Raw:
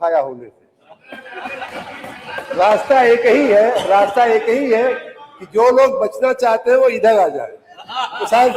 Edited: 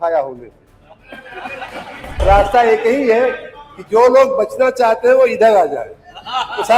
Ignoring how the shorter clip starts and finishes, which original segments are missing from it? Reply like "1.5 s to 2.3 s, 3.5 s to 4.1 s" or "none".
2.2 s to 3.8 s